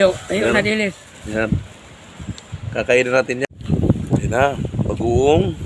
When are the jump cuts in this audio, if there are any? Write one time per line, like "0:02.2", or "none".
0:03.4

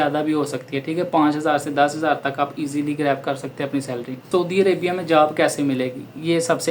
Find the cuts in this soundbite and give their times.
0:04.2

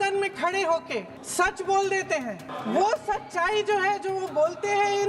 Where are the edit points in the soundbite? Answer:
0:01.2
0:02.5

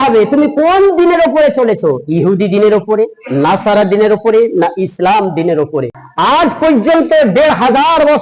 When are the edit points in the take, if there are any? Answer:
0:06.0

